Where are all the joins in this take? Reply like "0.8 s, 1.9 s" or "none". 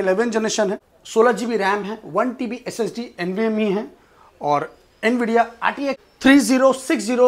0.9 s, 6.1 s